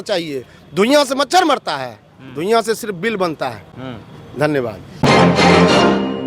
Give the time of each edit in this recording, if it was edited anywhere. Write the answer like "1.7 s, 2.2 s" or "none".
none